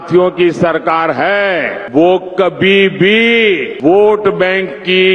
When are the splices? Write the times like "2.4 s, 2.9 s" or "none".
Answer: 1.8 s, 3.7 s